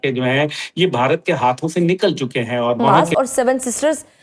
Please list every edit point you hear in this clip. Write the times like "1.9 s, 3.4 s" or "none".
3.0 s